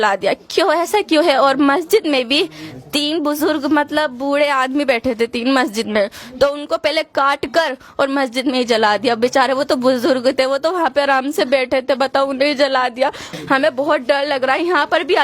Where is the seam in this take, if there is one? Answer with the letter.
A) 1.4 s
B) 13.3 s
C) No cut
B